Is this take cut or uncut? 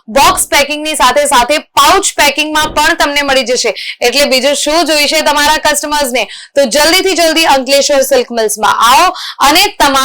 uncut